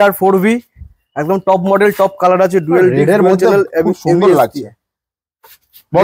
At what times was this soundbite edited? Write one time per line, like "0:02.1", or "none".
none